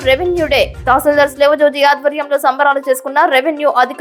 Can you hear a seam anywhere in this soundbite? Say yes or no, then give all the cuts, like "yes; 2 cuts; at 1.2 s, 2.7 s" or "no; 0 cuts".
no; 0 cuts